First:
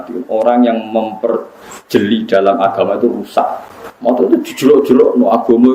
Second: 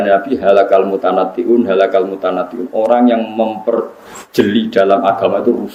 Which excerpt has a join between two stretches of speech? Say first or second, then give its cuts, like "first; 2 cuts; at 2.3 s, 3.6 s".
first; 1 cut; at 4.3 s